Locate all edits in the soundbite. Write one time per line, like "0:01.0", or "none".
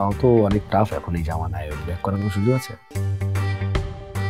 0:02.9